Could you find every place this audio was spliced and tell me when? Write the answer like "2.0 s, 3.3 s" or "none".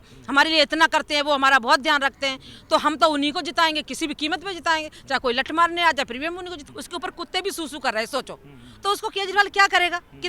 6.6 s